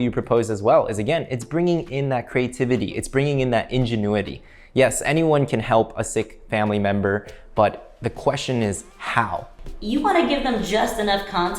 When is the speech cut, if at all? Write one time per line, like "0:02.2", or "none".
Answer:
0:09.6